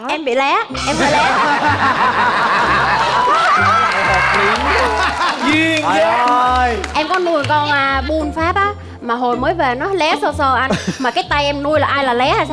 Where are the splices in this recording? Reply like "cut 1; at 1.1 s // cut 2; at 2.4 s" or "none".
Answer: none